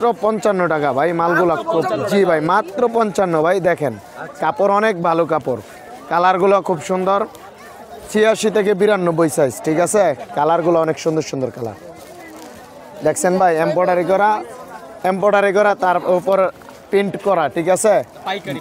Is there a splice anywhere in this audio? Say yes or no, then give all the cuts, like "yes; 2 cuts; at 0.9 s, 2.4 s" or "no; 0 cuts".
no; 0 cuts